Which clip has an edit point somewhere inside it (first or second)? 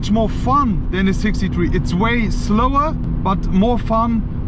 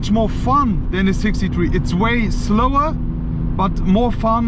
first